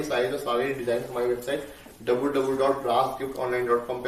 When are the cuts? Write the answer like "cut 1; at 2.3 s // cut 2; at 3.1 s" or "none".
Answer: none

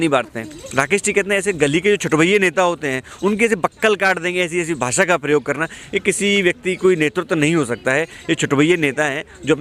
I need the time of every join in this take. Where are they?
none

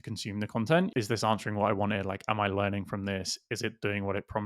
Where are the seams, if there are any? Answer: cut 1; at 0.9 s

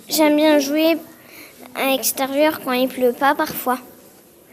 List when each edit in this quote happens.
none

